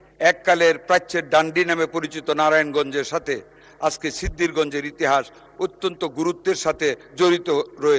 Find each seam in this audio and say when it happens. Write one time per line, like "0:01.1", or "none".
0:07.0